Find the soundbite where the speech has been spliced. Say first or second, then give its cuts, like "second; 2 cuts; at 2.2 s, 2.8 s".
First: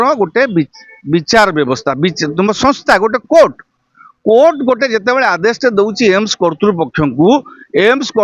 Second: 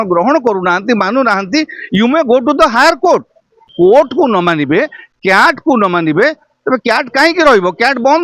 second; 1 cut; at 3.7 s